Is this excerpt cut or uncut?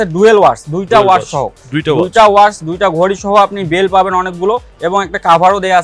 uncut